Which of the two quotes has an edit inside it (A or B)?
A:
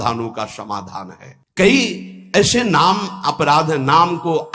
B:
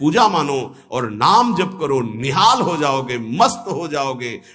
A